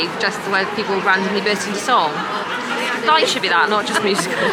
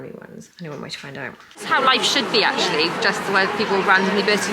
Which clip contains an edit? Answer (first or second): second